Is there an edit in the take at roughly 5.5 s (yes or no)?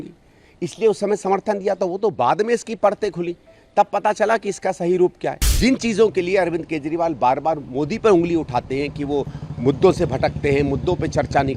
yes